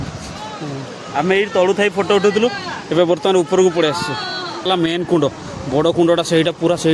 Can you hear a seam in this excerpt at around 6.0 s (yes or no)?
no